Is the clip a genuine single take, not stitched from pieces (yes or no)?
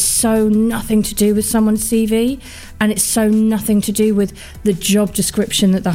yes